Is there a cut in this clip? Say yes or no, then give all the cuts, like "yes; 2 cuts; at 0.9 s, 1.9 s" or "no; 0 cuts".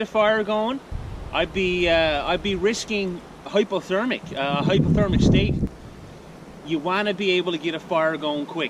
yes; 2 cuts; at 1.0 s, 5.8 s